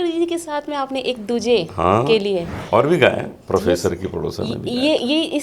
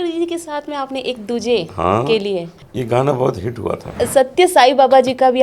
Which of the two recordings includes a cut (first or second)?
second